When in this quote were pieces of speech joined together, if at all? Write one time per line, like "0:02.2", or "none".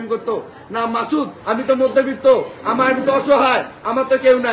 0:01.4